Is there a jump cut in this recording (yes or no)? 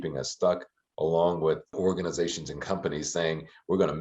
yes